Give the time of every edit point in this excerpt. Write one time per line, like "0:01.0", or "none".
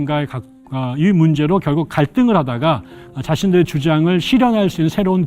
0:03.0

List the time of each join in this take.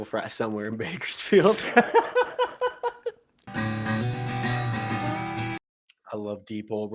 0:03.4

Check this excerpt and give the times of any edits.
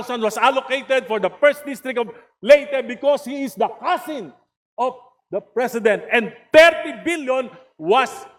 none

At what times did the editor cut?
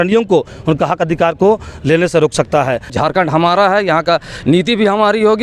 0:02.9

